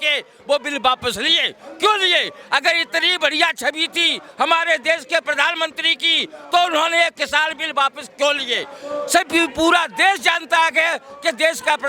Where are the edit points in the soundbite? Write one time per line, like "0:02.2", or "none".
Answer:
none